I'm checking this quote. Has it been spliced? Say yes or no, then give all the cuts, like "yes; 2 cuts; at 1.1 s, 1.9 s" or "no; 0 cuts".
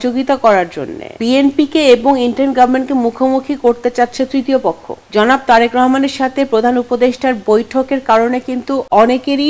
yes; 2 cuts; at 1.1 s, 4.9 s